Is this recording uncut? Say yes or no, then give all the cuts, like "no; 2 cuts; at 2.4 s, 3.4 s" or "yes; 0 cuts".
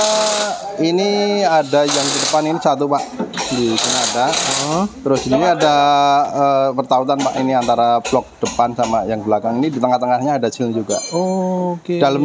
yes; 0 cuts